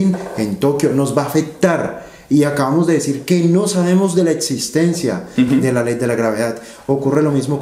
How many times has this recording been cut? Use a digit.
0